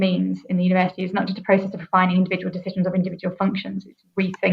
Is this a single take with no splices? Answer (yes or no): yes